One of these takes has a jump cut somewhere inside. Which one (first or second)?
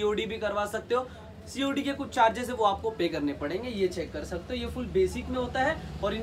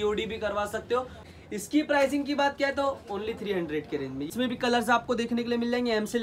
second